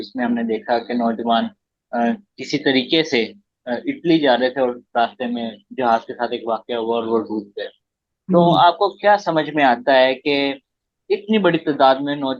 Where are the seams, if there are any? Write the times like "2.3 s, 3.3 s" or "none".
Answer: none